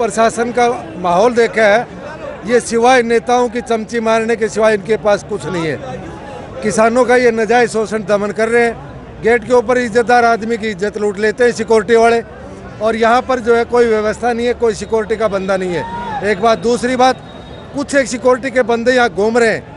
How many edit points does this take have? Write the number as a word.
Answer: zero